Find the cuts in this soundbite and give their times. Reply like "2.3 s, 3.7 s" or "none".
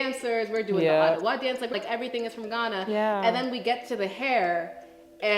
1.7 s